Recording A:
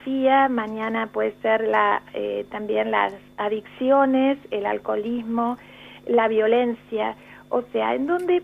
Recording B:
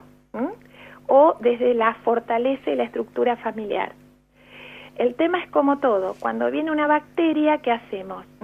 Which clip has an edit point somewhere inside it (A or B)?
A